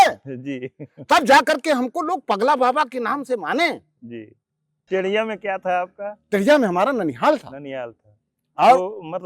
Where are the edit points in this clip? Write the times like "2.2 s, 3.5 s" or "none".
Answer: 4.9 s